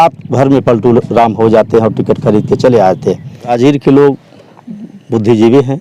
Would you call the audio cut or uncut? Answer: cut